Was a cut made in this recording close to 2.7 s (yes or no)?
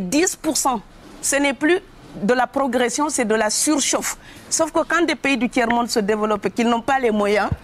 no